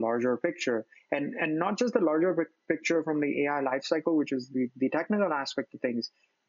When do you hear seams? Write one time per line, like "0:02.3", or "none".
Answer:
none